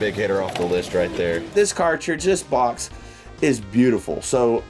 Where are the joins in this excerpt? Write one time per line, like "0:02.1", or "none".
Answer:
none